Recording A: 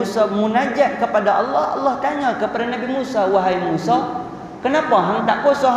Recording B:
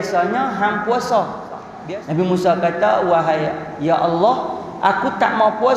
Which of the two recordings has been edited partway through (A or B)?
B